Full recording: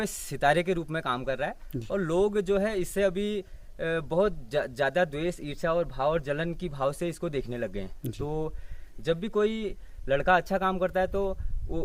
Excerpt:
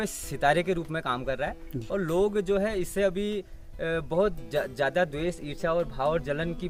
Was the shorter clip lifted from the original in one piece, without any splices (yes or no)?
yes